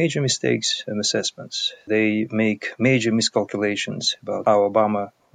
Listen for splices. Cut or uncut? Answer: cut